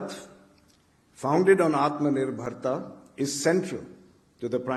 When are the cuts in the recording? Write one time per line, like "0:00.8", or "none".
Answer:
none

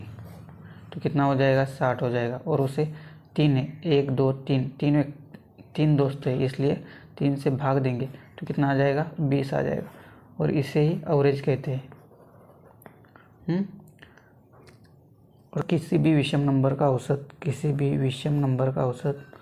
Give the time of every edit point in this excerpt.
0:15.6

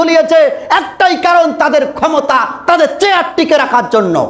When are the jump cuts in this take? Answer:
none

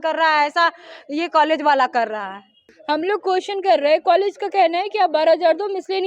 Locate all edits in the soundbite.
0:02.5

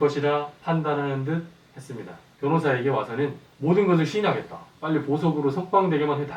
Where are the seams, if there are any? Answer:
0:02.2

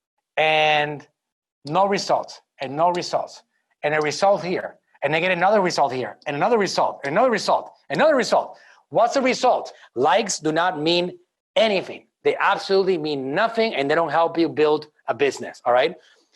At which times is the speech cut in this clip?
0:09.8

